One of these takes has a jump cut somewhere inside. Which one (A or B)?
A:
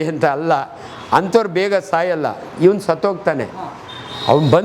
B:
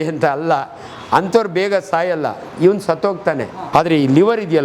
B